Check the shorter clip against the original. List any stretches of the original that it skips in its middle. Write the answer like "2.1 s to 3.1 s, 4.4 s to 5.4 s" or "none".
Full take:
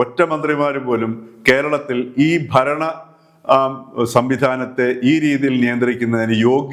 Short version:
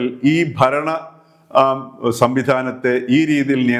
none